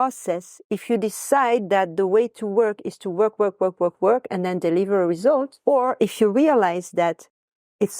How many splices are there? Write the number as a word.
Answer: one